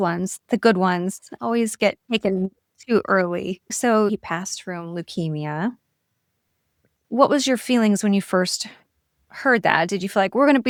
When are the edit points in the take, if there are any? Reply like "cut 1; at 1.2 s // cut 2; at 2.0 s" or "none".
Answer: none